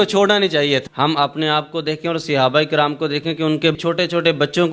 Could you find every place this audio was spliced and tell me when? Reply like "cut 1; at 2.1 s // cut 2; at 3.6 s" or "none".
cut 1; at 0.8 s // cut 2; at 3.8 s